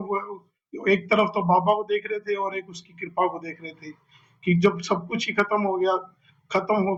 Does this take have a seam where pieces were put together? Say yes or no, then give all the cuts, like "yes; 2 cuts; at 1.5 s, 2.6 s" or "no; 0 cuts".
no; 0 cuts